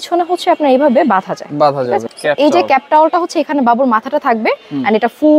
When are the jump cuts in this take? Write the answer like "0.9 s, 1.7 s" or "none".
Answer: 2.1 s